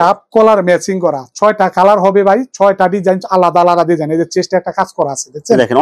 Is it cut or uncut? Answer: uncut